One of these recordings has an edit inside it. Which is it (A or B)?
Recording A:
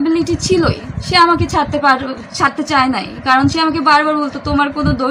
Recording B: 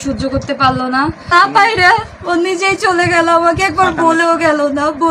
B